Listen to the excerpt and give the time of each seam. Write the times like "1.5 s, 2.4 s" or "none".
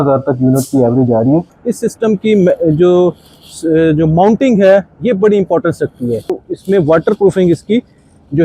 1.6 s, 6.4 s